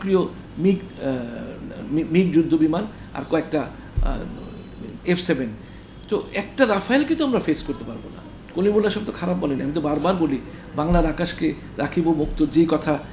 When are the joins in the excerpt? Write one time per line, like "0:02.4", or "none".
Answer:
none